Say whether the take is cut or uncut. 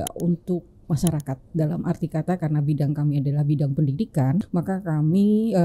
cut